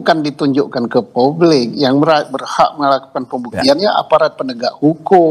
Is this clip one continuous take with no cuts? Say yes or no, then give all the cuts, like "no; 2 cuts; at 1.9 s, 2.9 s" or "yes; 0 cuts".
yes; 0 cuts